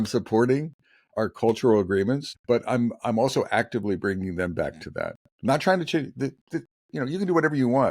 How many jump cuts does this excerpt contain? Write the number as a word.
one